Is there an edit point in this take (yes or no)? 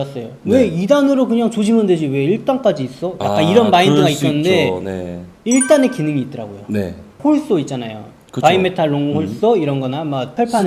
no